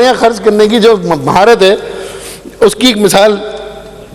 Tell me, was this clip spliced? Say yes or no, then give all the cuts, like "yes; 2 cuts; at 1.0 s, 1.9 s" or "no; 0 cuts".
no; 0 cuts